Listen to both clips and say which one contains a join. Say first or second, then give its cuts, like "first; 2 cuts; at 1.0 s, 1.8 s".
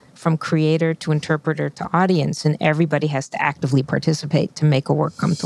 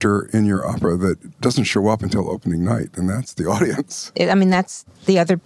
second; 1 cut; at 3.8 s